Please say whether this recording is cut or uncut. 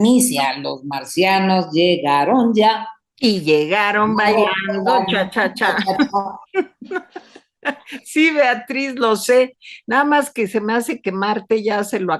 uncut